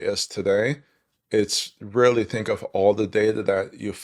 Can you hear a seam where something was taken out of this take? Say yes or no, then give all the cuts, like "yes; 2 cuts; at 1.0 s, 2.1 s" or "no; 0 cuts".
no; 0 cuts